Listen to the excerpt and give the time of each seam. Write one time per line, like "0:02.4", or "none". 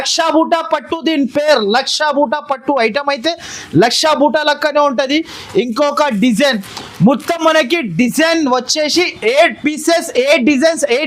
none